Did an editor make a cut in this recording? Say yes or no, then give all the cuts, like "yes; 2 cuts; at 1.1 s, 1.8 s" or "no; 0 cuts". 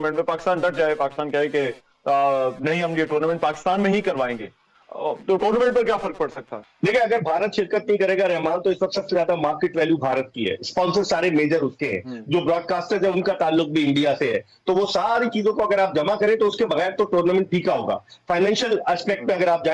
no; 0 cuts